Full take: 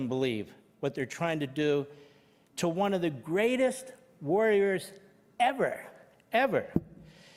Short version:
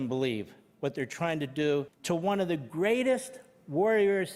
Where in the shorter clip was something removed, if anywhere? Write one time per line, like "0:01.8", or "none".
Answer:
0:01.9